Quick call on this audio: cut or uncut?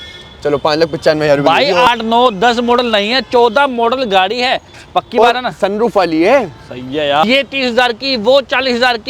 cut